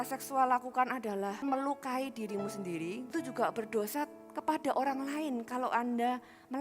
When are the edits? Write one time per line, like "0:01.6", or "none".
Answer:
0:01.4
0:03.1